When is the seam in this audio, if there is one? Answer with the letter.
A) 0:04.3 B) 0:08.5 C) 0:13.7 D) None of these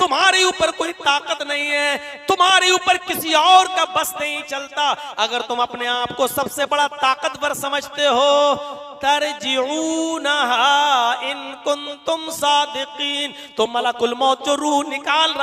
D